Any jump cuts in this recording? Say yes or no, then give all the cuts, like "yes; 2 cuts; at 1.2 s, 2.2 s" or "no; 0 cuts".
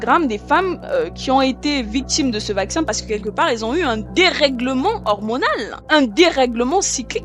yes; 1 cut; at 5.7 s